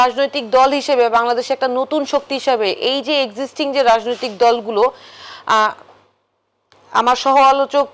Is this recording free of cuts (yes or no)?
yes